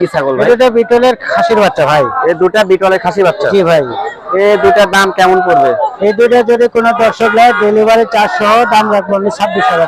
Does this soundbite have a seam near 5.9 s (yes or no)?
no